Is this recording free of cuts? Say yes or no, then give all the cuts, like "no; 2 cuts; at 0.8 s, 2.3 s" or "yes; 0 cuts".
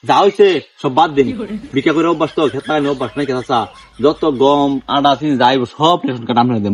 yes; 0 cuts